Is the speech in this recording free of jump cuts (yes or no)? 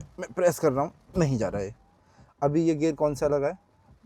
yes